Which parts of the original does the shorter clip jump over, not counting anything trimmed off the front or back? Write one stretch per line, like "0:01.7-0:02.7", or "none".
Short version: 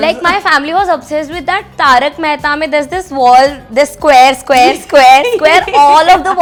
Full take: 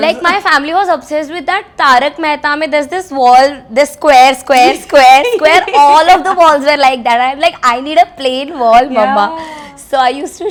none